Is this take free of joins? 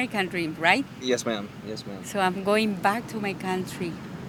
yes; 0 cuts

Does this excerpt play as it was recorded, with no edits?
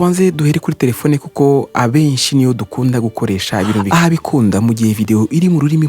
no; 1 cut; at 3.9 s

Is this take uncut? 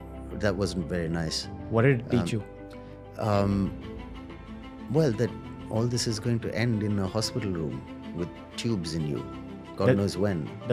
yes; 0 cuts

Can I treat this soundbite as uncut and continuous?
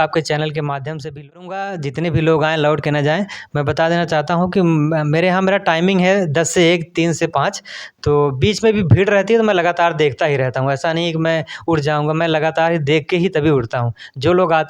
no; 1 cut; at 1.2 s

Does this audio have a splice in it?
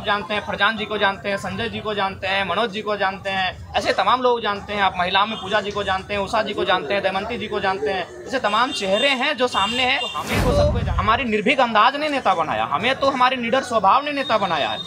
yes; 1 cut; at 10.3 s

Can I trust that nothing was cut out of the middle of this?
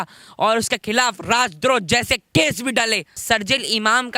no; 1 cut; at 3.1 s

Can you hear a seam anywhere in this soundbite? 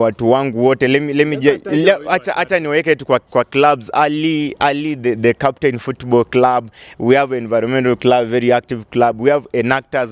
no; 0 cuts

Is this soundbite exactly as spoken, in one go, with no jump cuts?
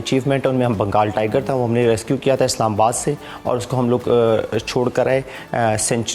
yes; 0 cuts

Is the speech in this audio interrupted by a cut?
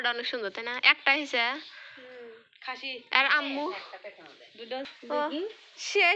yes; 1 cut; at 4.9 s

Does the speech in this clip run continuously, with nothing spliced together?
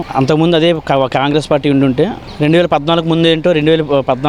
yes; 0 cuts

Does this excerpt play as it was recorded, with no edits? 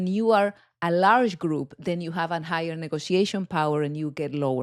yes; 0 cuts

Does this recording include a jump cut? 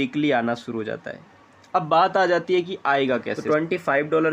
yes; 1 cut; at 3.3 s

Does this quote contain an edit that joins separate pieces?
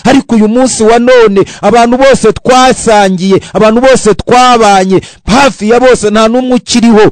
no; 0 cuts

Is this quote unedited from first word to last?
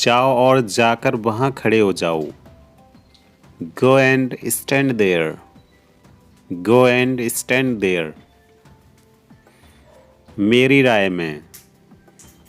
no; 1 cut; at 11.5 s

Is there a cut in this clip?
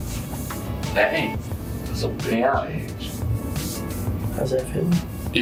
no; 0 cuts

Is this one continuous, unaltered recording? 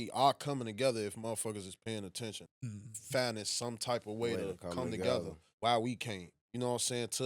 no; 2 cuts; at 2.4 s, 5.4 s

